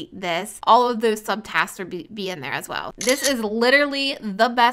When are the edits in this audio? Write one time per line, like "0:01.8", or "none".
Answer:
0:02.9

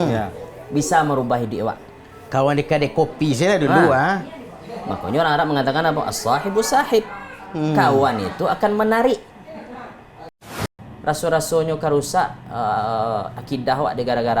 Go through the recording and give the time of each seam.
0:10.5

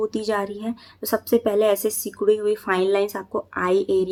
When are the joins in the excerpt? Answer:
none

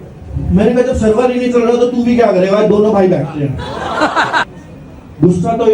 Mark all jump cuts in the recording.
0:04.5

